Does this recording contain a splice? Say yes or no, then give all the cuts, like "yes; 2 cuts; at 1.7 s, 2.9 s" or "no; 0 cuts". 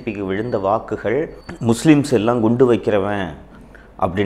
no; 0 cuts